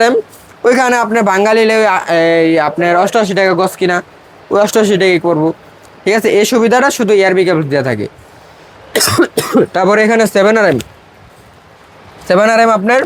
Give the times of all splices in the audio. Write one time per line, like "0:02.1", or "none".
none

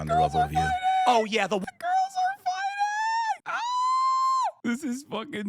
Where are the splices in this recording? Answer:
0:03.5
0:04.4

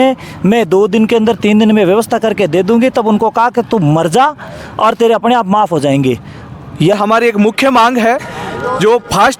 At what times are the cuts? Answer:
0:06.9

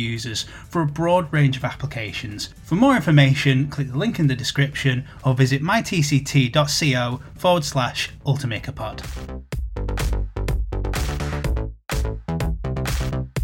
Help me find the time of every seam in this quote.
0:09.2

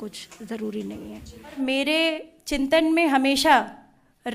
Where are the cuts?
0:01.6

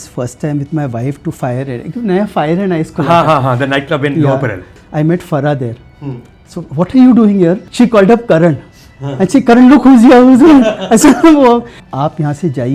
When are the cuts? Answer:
0:04.8
0:07.6
0:11.8

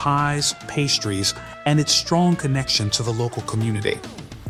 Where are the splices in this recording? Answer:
none

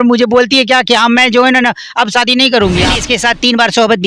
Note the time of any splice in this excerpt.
0:02.9

